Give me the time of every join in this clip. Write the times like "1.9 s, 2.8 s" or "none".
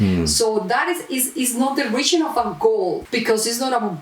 3.0 s